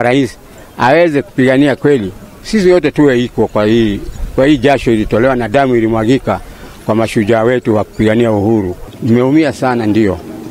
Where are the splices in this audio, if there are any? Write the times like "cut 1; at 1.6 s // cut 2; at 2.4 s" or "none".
cut 1; at 8.9 s